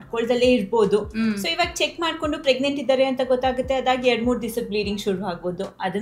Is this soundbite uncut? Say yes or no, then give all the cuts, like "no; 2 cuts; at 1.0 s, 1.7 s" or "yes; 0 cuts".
yes; 0 cuts